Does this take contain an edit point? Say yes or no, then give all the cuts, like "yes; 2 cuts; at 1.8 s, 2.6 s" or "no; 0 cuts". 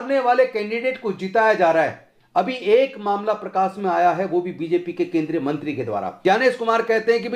yes; 1 cut; at 6.1 s